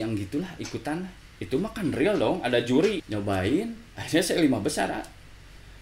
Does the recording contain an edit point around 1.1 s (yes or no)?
no